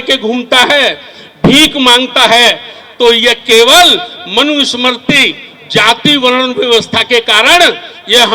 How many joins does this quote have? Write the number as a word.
zero